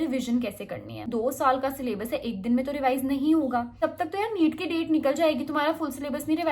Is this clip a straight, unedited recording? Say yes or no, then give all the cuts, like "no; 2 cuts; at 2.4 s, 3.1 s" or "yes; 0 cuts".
no; 2 cuts; at 1.1 s, 3.8 s